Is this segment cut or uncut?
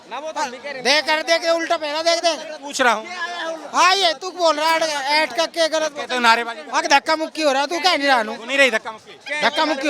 uncut